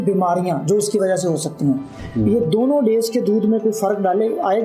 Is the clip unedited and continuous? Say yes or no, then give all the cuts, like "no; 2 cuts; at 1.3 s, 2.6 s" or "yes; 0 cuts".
yes; 0 cuts